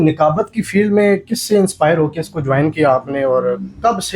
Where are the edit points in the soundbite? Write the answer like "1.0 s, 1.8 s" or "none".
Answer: none

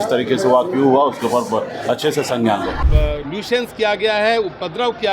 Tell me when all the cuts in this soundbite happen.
2.8 s

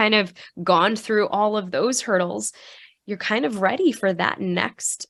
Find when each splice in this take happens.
none

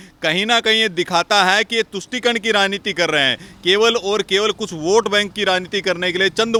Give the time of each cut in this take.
none

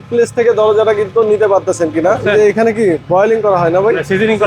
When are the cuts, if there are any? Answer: 2.2 s

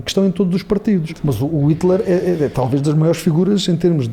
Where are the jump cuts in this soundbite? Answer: 1.2 s

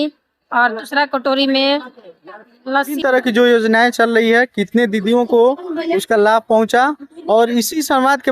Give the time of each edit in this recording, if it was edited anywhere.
3.0 s

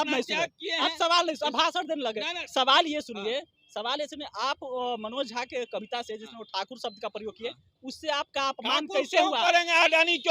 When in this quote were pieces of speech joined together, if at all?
none

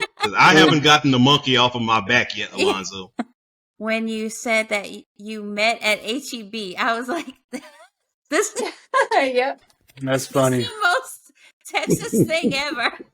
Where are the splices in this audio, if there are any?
3.4 s

